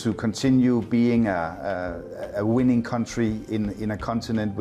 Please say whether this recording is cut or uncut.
uncut